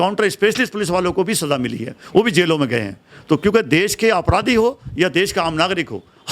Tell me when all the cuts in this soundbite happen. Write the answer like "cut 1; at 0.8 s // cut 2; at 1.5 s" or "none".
none

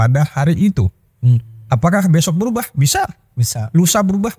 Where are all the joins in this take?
none

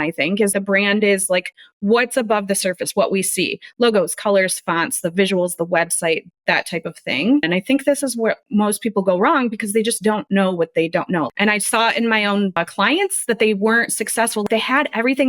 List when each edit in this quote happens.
cut 1; at 7.4 s // cut 2; at 11.3 s

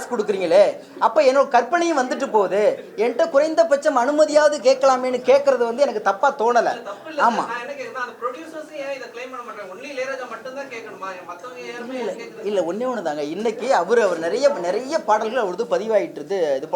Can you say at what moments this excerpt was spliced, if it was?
none

